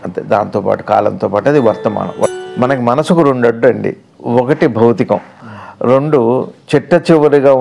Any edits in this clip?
yes; 1 cut; at 2.3 s

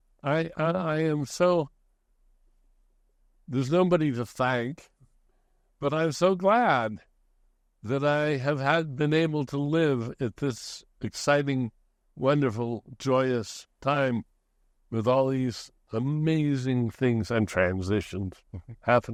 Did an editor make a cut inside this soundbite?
no; 0 cuts

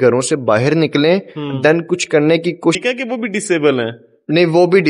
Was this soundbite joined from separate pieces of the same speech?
yes; 1 cut; at 2.8 s

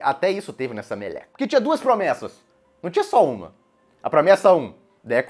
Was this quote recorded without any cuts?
yes; 0 cuts

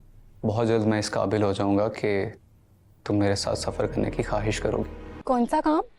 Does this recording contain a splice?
yes; 1 cut; at 5.1 s

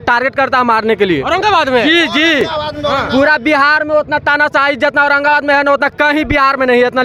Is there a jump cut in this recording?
no; 0 cuts

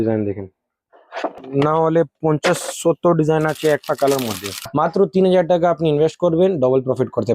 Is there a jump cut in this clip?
yes; 2 cuts; at 1.4 s, 4.7 s

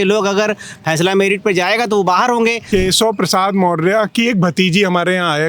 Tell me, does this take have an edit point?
yes; 1 cut; at 2.6 s

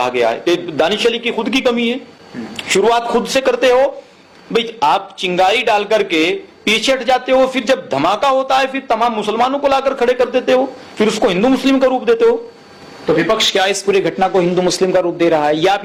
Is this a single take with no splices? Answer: yes; 0 cuts

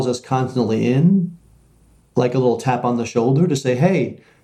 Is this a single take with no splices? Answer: yes; 0 cuts

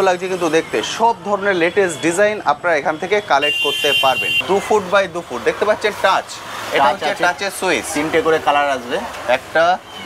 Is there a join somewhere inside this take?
yes; 1 cut; at 4.3 s

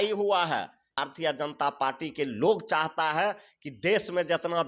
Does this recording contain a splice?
yes; 1 cut; at 0.9 s

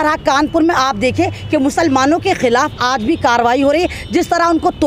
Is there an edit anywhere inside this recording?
no; 0 cuts

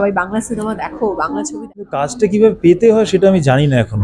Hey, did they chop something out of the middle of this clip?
yes; 1 cut; at 1.5 s

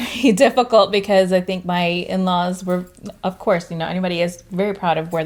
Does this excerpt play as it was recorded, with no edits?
yes; 0 cuts

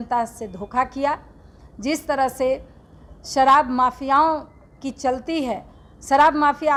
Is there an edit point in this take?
no; 0 cuts

